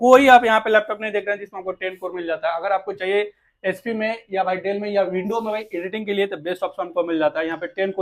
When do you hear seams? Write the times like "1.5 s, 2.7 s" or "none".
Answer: none